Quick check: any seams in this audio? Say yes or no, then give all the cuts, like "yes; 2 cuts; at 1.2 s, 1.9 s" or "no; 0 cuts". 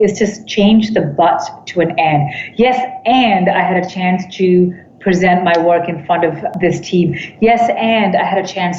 yes; 1 cut; at 6.5 s